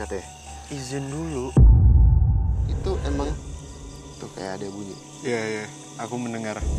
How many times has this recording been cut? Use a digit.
1